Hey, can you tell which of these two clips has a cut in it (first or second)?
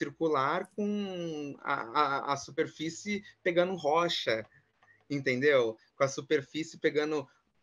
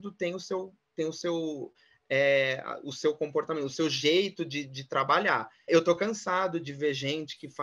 second